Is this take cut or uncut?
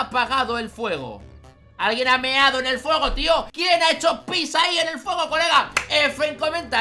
cut